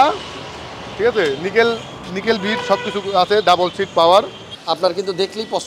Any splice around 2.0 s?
no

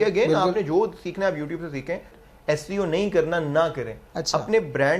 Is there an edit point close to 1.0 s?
no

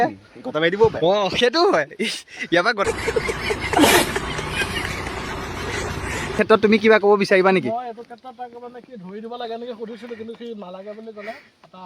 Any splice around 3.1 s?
yes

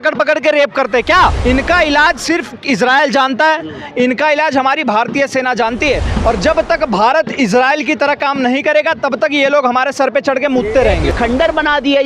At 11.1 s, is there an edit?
yes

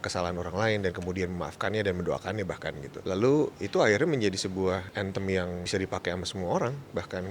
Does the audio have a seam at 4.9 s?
yes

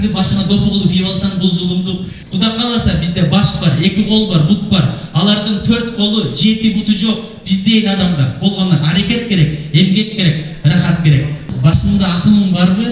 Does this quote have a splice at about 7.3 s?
no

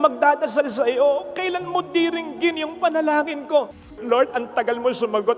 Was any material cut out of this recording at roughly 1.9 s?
no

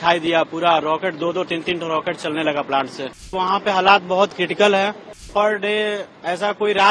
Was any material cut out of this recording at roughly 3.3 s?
yes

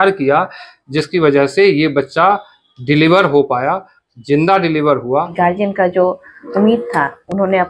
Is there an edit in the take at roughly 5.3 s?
yes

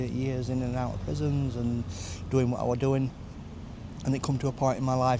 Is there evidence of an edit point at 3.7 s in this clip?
no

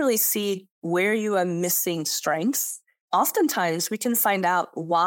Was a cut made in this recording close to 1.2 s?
no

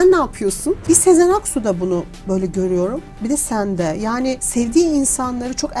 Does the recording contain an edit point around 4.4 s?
yes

